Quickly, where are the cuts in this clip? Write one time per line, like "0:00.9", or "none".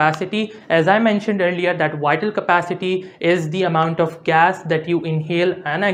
none

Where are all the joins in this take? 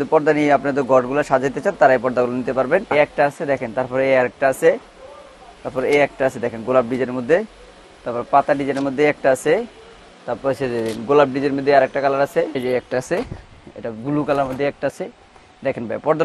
0:02.9
0:12.5

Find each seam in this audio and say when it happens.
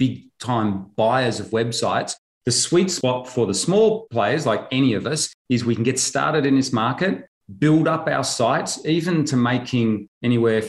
0:04.0

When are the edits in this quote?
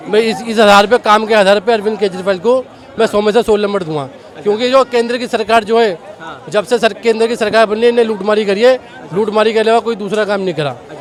none

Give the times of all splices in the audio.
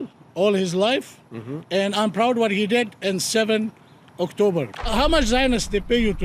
0:04.9

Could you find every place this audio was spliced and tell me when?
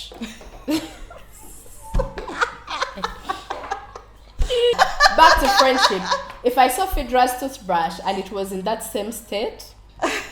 0:04.7

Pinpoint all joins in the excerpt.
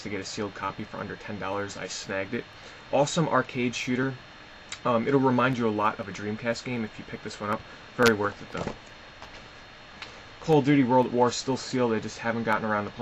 none

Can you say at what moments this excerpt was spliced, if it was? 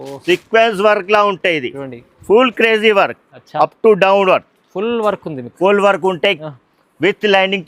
none

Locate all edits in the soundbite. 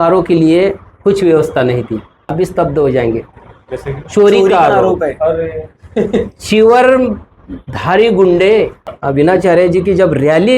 0:02.3
0:08.9

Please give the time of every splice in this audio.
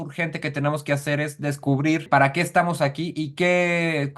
0:02.1

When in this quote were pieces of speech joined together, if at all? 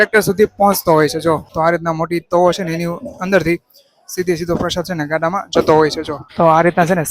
0:01.5
0:06.2

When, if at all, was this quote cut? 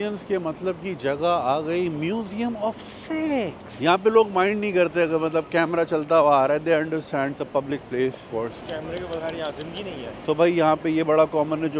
0:03.7
0:10.2

